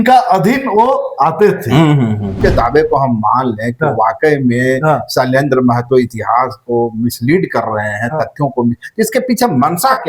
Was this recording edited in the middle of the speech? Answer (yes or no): yes